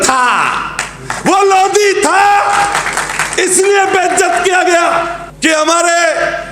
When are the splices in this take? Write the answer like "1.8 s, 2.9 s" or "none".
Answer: 5.2 s